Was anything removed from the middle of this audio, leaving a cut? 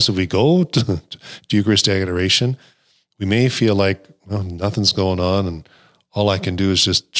no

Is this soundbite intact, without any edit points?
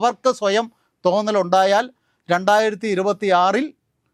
yes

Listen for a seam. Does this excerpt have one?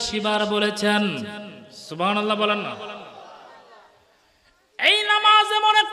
no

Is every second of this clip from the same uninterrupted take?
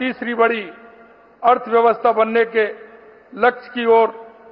yes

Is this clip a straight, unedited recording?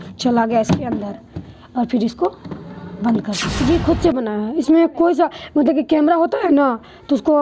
no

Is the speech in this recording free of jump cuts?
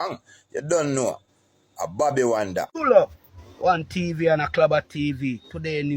no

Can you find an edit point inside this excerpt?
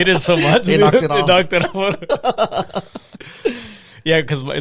no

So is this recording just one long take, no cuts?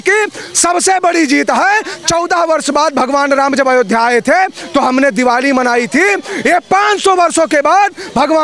yes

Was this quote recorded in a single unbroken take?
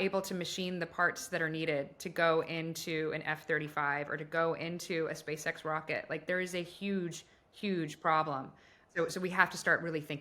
no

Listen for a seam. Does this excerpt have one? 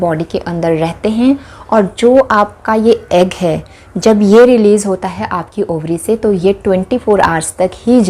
no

